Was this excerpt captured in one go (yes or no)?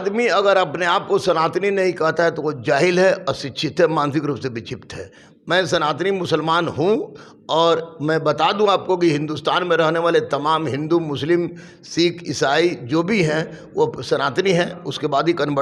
yes